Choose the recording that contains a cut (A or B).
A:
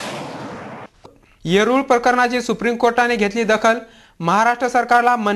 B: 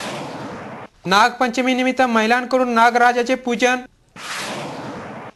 A